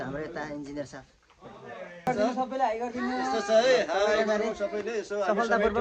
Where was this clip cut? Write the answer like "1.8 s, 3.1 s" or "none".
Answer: 2.1 s